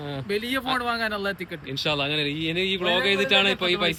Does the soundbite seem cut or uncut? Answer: uncut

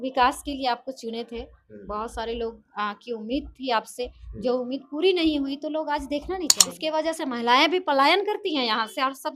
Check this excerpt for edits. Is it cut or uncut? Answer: cut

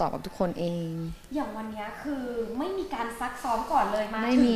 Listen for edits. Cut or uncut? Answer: uncut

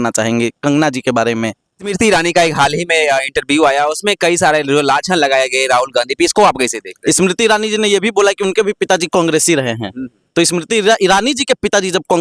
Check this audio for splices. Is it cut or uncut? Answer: cut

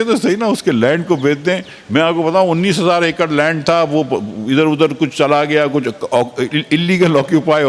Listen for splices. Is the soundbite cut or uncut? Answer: uncut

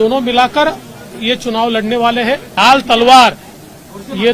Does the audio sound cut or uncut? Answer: cut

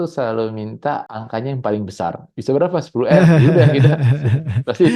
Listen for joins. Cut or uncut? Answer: cut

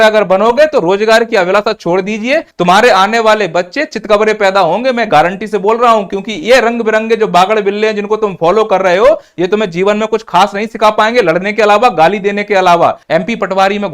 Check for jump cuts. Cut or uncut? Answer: cut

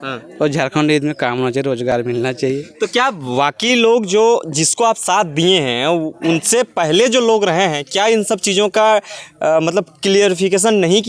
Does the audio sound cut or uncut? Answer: uncut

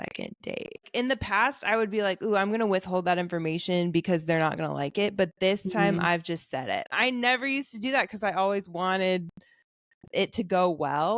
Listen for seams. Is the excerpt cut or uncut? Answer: cut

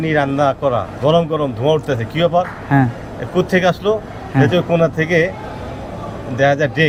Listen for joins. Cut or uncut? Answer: uncut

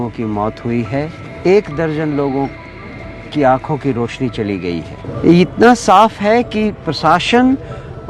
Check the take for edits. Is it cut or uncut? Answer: cut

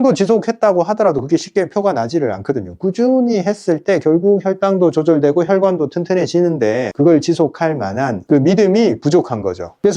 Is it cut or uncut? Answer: uncut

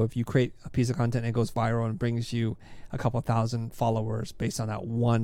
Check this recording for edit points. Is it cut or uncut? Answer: uncut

